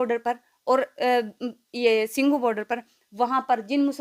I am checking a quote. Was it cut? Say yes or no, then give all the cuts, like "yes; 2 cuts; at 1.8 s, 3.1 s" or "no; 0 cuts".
no; 0 cuts